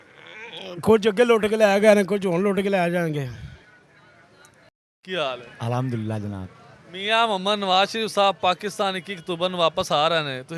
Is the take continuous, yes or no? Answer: yes